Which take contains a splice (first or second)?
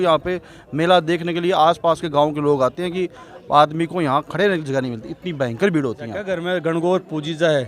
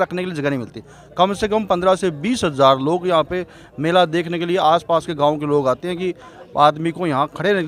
first